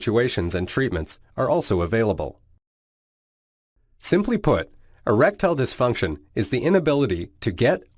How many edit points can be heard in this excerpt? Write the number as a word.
one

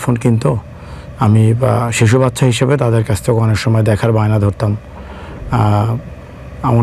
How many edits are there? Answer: zero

